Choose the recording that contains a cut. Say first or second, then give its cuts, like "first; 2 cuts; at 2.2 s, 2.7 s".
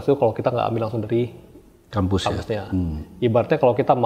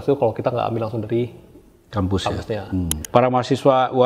second; 1 cut; at 3.0 s